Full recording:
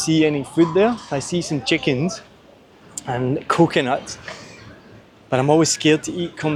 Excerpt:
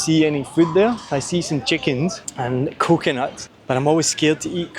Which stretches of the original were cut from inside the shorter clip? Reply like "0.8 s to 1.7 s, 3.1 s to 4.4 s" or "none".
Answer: 2.3 s to 3.0 s, 4.2 s to 5.1 s